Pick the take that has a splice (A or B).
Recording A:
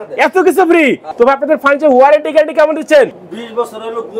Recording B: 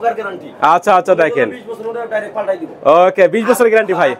A